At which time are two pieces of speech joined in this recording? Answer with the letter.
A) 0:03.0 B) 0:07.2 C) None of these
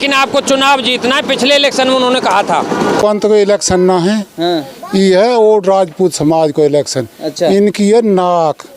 A